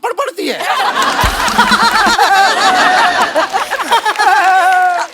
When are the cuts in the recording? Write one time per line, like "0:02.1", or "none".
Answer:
0:01.5